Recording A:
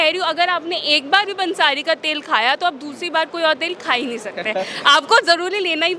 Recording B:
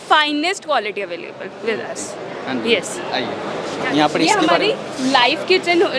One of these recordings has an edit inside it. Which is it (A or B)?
B